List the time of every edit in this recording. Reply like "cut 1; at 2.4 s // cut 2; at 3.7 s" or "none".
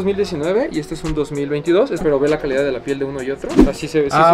cut 1; at 2.0 s